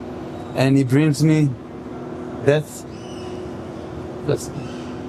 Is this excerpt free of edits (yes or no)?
yes